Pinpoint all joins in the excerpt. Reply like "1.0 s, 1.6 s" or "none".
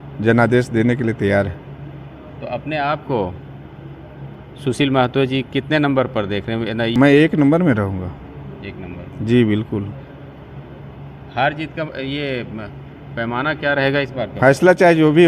6.9 s